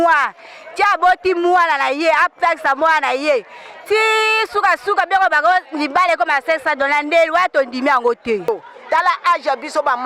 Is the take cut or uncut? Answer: cut